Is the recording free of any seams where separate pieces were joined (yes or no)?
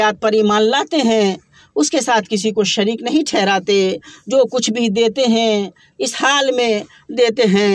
yes